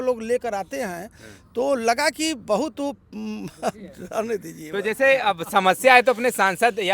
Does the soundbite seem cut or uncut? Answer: uncut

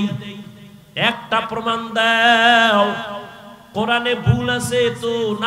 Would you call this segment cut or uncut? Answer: uncut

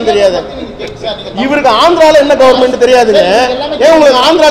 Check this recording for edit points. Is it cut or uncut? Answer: uncut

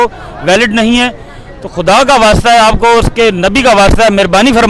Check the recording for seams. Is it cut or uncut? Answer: uncut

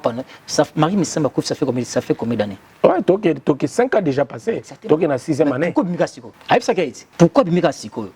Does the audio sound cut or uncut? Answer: cut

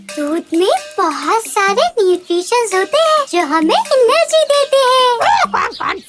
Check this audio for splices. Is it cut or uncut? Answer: uncut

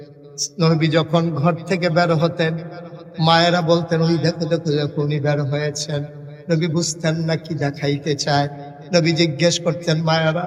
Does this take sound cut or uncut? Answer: uncut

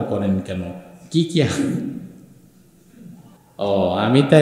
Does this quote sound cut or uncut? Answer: cut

